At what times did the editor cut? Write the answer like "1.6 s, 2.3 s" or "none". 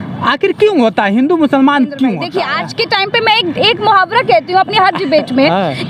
2.4 s